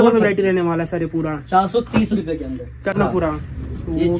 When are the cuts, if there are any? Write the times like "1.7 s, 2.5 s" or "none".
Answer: 3.0 s